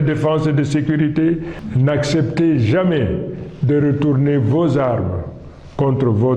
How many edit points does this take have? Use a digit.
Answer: 1